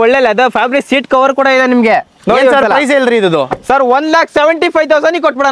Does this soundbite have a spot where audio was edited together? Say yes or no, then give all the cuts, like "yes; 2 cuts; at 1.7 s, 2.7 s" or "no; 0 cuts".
no; 0 cuts